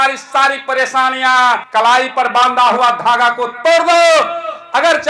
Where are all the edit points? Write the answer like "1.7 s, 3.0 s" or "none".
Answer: 1.6 s